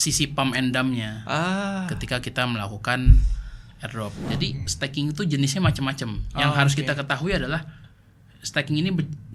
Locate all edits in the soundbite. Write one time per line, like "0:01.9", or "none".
0:04.2